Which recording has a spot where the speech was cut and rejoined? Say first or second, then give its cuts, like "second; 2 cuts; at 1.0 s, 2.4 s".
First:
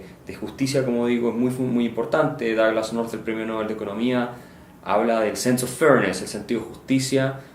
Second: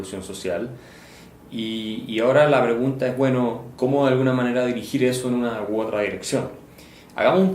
second; 1 cut; at 2.5 s